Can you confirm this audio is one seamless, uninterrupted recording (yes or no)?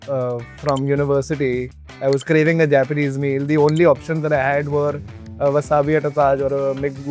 yes